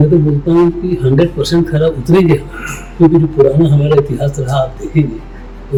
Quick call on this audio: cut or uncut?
uncut